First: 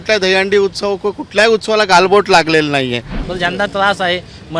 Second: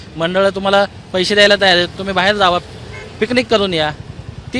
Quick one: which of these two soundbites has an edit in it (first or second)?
first